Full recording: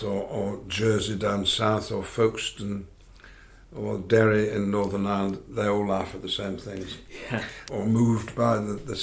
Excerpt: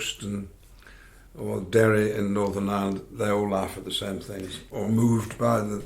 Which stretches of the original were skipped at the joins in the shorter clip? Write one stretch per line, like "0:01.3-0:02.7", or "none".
0:07.0-0:07.6